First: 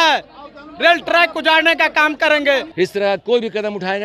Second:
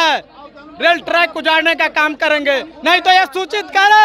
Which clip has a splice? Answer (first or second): first